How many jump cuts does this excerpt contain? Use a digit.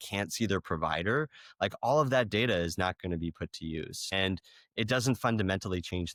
0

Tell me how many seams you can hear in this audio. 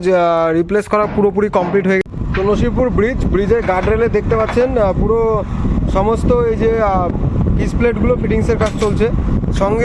1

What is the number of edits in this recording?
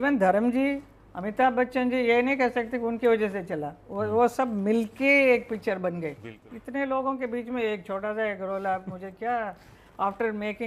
1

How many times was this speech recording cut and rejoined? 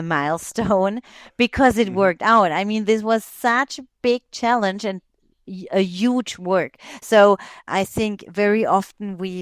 1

